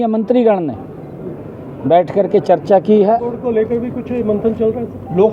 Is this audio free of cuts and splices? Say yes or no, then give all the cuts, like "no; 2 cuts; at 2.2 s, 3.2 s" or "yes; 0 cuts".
no; 1 cut; at 3.4 s